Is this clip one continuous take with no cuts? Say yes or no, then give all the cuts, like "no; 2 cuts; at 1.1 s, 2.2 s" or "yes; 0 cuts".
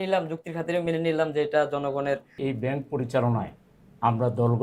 no; 1 cut; at 2.3 s